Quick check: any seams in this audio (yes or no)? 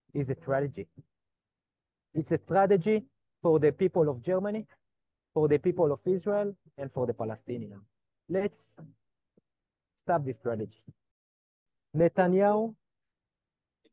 yes